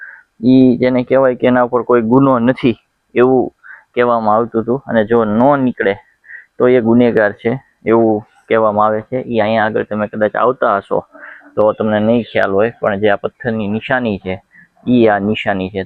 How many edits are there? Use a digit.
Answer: 0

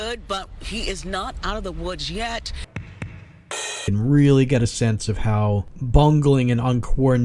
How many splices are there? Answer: 3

